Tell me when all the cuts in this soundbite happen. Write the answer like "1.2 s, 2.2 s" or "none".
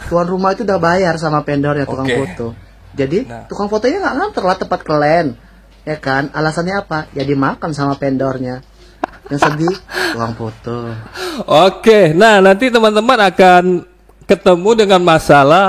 11.1 s